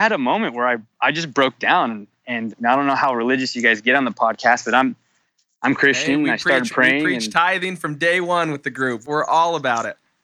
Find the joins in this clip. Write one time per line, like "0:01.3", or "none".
none